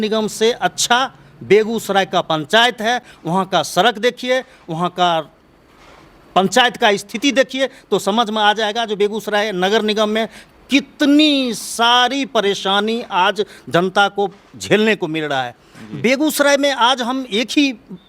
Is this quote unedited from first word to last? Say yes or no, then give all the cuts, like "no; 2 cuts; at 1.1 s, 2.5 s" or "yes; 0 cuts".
yes; 0 cuts